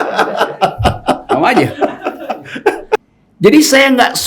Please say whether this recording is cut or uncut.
cut